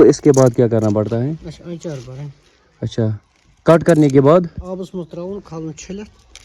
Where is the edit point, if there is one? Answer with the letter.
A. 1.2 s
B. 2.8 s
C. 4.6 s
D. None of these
C